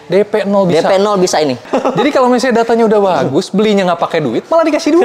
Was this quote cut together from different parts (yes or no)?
yes